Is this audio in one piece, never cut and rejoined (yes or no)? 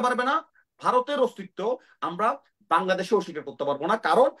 yes